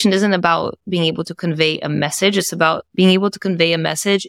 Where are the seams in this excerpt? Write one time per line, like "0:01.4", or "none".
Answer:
0:02.9

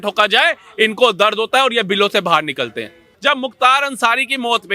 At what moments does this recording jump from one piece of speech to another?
0:03.1

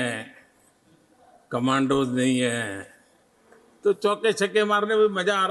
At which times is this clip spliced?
none

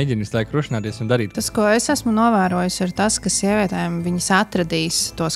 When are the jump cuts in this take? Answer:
0:01.3

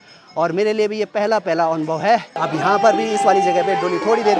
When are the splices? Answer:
none

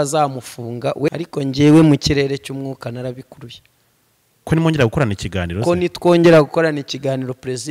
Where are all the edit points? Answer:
0:01.1

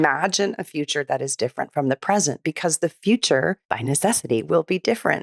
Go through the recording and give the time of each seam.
0:03.7

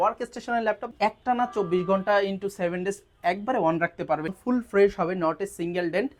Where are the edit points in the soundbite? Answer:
0:00.9
0:04.3

